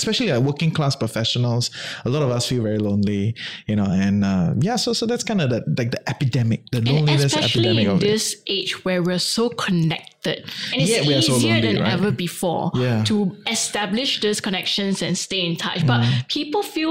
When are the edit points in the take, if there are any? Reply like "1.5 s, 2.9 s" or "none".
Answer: none